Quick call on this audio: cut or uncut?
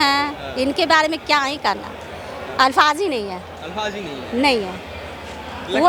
uncut